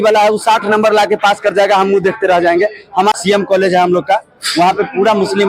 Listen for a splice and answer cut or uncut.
cut